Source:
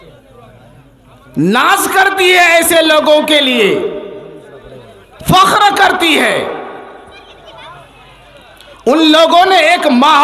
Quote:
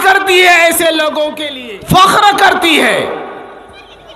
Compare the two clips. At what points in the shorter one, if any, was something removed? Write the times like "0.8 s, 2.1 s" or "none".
1.4 s